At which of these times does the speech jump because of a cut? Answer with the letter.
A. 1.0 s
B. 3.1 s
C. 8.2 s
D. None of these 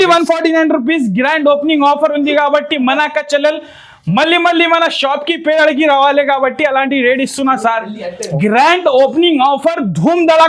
C